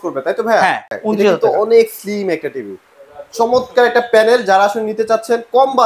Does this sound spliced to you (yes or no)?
yes